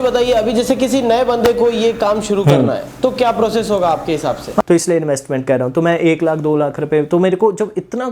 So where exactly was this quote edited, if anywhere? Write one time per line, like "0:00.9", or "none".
0:02.9
0:04.6